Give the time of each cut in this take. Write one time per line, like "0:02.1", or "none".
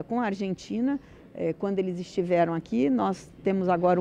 none